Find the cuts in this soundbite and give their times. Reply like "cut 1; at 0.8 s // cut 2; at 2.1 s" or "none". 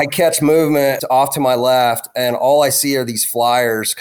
cut 1; at 1.0 s